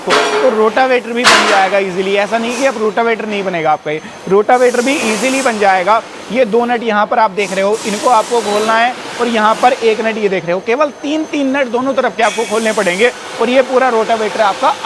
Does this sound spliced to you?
no; 0 cuts

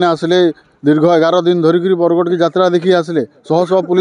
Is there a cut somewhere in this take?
no; 0 cuts

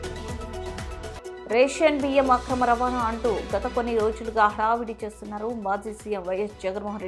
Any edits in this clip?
yes; 1 cut; at 1.4 s

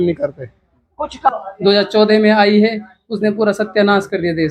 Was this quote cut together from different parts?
yes; 1 cut; at 1.3 s

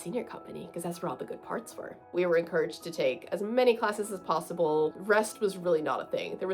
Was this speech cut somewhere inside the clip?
yes; 2 cuts; at 2.1 s, 5.0 s

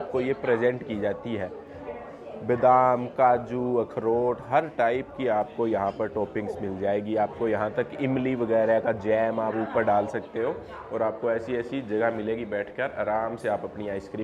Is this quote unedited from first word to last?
yes; 0 cuts

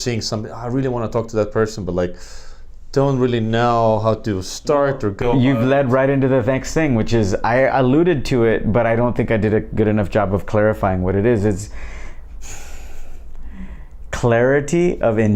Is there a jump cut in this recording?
no; 0 cuts

